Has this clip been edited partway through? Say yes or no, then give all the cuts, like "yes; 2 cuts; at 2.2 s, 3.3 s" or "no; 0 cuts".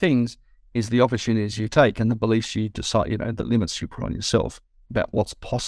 no; 0 cuts